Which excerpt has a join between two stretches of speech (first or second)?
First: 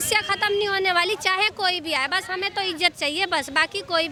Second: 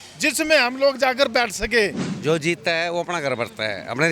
second